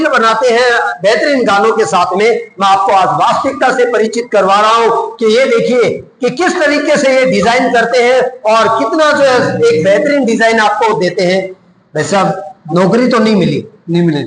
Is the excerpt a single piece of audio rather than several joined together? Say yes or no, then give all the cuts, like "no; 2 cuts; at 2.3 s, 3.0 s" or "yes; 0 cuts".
yes; 0 cuts